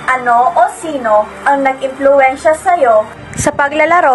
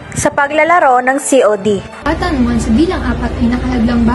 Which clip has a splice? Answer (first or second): second